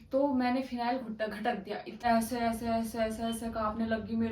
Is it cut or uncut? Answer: cut